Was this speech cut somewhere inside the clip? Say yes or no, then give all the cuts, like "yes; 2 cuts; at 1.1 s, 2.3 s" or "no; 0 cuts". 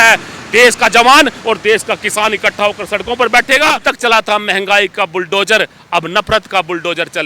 yes; 1 cut; at 3.8 s